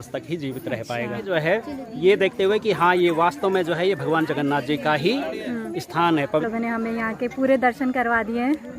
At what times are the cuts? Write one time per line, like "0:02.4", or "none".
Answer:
0:01.3
0:06.5